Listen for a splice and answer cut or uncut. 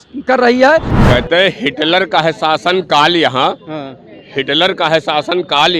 cut